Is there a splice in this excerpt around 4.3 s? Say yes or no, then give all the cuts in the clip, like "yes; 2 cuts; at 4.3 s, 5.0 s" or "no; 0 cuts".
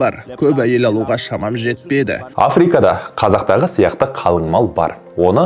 no; 1 cut; at 2.2 s